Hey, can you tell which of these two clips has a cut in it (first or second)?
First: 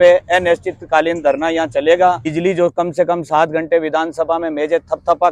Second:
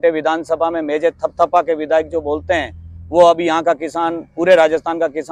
first